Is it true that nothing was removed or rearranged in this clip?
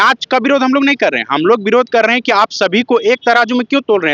yes; 0 cuts

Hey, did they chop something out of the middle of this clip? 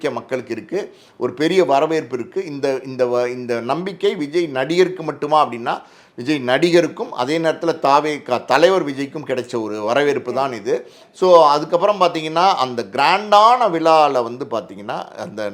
no; 0 cuts

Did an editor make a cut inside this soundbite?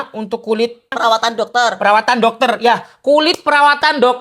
yes; 1 cut; at 0.9 s

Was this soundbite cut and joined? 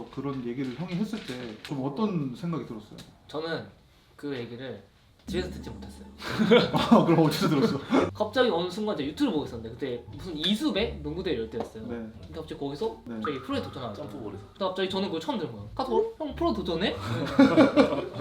yes; 3 cuts; at 1.7 s, 13.1 s, 14.5 s

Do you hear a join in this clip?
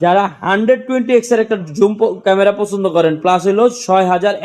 no; 0 cuts

